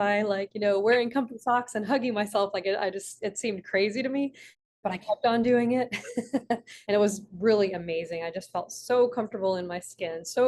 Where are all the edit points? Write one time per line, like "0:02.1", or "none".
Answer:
0:06.7

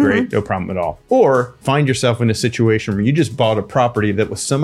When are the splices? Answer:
0:01.0
0:01.6

